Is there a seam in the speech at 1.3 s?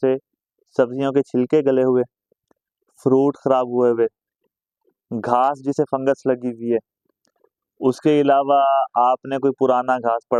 no; 0 cuts

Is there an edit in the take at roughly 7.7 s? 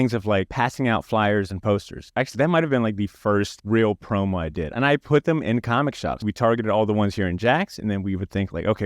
no; 3 cuts; at 2.1 s, 4.7 s, 6.1 s

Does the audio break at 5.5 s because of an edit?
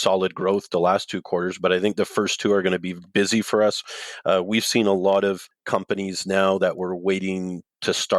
yes; 1 cut; at 5.5 s

